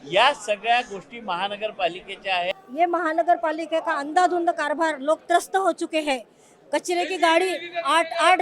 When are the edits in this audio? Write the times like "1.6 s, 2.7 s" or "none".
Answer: 2.5 s